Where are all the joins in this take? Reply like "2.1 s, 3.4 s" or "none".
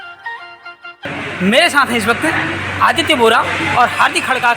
1.1 s